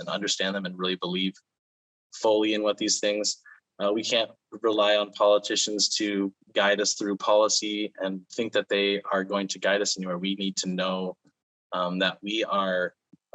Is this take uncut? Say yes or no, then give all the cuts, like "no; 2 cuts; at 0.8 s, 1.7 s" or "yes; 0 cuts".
yes; 0 cuts